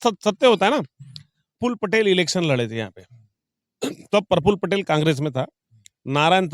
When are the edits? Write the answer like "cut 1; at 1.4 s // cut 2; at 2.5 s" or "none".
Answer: cut 1; at 1.6 s